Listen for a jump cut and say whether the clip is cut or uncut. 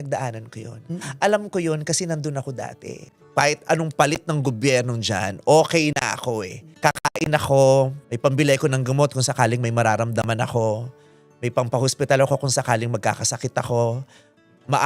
cut